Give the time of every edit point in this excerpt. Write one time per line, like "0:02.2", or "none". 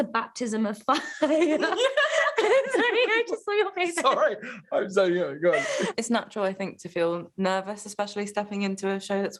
none